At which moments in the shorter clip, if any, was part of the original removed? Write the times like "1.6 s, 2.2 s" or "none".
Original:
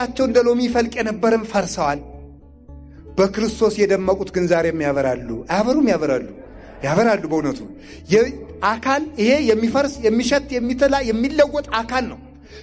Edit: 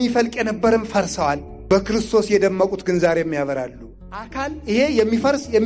1.5 s, 3.9 s